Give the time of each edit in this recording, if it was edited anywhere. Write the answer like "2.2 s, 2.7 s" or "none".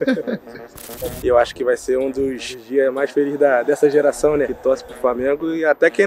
0.9 s, 4.5 s